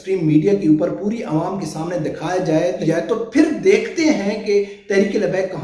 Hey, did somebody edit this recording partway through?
yes; 1 cut; at 2.8 s

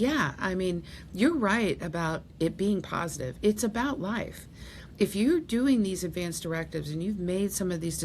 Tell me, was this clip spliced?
no; 0 cuts

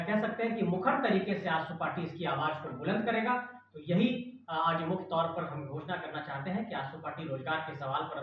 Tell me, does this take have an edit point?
no; 0 cuts

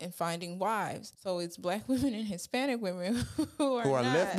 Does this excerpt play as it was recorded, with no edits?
yes; 0 cuts

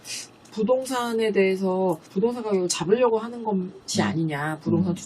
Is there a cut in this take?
yes; 1 cut; at 2.1 s

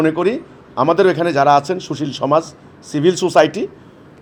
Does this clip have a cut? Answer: no; 0 cuts

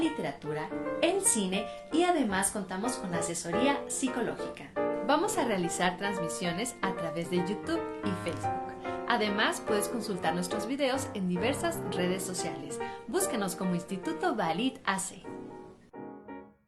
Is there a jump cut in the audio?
no; 0 cuts

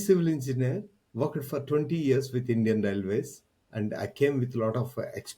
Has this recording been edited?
no; 0 cuts

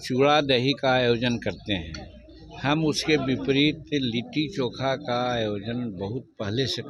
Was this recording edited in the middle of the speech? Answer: no; 0 cuts

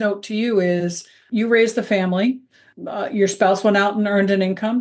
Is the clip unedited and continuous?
yes; 0 cuts

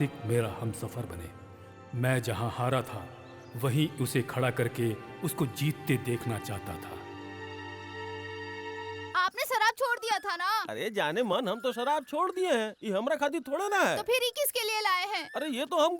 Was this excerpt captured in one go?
no; 1 cut; at 9.1 s

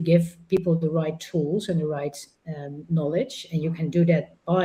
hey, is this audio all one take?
yes; 0 cuts

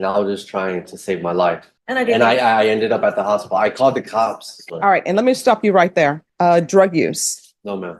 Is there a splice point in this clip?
yes; 3 cuts; at 1.7 s, 4.5 s, 6.2 s

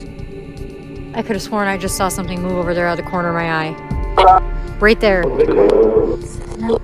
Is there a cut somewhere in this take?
no; 0 cuts

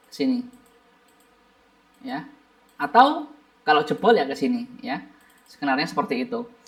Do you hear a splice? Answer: no; 0 cuts

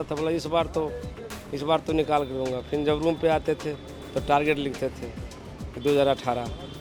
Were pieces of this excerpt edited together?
no; 0 cuts

